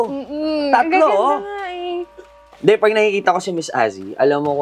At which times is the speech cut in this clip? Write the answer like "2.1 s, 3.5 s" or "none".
2.2 s